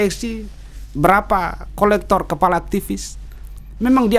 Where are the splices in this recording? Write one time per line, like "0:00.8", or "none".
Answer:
none